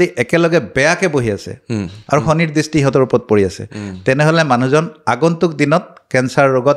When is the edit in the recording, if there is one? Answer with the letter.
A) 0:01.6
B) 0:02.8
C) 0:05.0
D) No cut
D